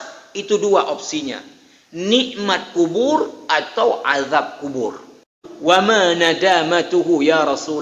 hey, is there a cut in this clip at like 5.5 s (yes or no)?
yes